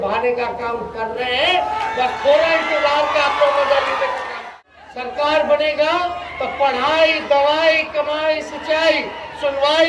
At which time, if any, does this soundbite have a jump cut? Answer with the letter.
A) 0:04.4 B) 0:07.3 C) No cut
A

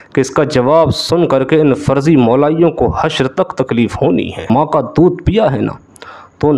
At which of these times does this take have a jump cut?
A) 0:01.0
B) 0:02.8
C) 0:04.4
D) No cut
C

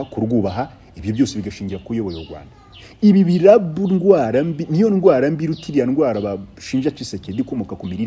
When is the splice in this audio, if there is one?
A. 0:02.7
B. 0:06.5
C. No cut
C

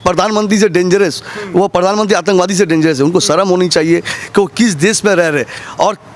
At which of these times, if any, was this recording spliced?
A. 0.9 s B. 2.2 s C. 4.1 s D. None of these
D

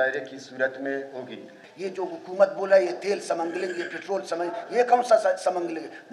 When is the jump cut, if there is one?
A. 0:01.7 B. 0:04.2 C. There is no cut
A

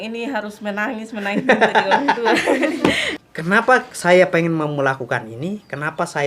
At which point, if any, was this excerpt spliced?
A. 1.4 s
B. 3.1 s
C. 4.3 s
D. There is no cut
B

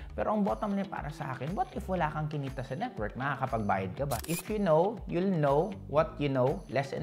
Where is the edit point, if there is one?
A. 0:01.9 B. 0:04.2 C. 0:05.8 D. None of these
B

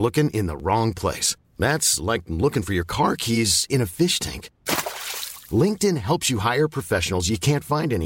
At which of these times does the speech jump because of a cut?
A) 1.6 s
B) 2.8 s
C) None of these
C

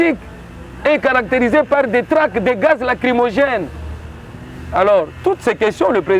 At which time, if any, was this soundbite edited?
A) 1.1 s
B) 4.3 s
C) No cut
C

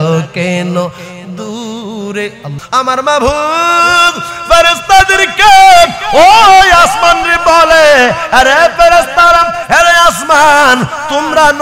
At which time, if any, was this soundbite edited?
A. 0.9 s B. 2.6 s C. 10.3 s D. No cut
B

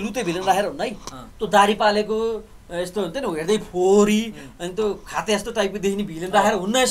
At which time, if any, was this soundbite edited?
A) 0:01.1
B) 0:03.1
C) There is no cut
C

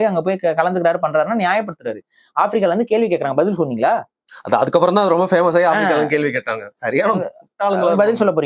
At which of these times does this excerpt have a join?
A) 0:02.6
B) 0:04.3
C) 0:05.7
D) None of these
D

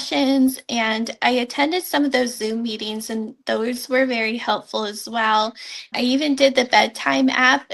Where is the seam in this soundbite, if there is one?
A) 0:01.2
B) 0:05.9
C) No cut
B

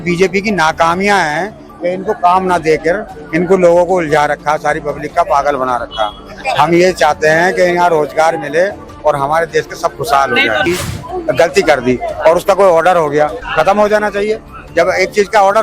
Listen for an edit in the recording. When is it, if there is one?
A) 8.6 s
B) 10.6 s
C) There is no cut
B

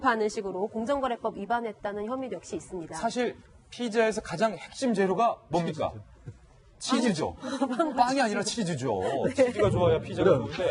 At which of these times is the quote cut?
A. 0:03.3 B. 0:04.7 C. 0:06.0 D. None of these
C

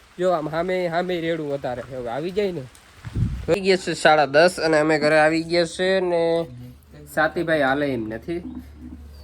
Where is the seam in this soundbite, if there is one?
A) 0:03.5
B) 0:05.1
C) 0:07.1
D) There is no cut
A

